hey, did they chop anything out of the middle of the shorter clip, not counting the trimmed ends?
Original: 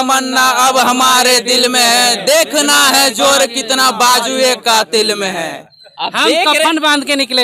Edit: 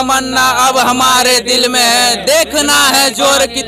no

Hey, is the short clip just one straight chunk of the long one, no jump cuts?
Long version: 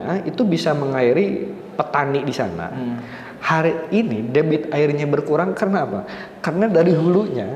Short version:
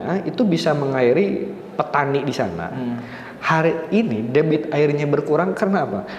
yes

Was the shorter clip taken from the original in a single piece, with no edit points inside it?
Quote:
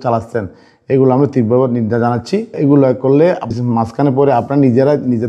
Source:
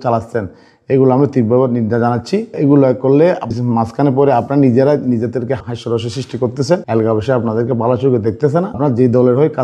yes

